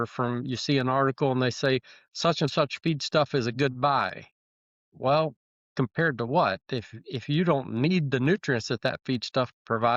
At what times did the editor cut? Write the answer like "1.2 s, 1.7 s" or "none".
none